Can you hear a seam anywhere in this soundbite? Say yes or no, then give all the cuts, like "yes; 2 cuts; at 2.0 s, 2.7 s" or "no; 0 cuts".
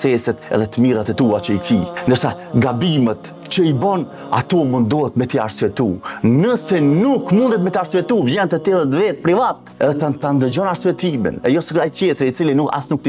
yes; 1 cut; at 2.1 s